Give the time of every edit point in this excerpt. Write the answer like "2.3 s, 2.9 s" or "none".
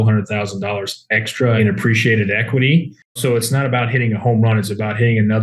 1.6 s, 3.2 s